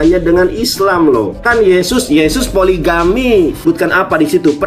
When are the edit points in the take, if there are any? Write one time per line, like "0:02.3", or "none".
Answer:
0:01.4
0:03.6